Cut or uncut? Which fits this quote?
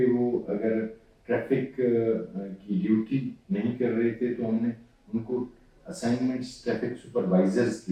uncut